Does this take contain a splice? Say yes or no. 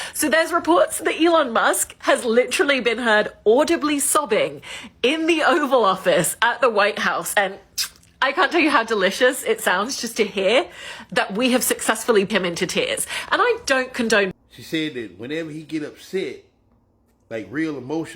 yes